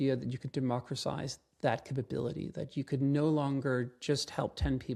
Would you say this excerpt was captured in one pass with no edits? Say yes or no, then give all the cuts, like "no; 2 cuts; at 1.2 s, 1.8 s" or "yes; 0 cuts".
yes; 0 cuts